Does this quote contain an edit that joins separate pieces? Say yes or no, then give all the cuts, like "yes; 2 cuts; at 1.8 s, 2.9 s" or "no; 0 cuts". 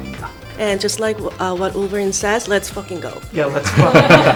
no; 0 cuts